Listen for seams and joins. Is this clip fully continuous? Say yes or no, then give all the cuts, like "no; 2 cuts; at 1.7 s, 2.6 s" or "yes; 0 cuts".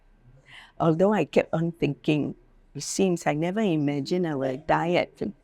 yes; 0 cuts